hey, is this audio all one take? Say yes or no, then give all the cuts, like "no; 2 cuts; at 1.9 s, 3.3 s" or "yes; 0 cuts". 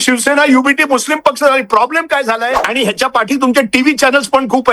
no; 1 cut; at 2.6 s